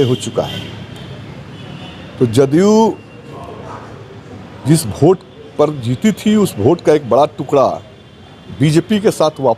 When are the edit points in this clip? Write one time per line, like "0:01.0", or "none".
none